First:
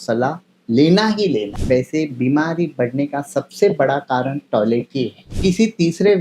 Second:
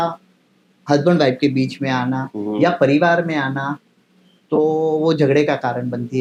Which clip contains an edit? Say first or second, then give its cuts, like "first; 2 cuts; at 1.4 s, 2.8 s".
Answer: first; 2 cuts; at 1.5 s, 5.3 s